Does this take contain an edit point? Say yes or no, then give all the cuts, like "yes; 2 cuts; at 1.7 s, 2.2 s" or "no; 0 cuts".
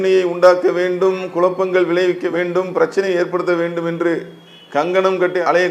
no; 0 cuts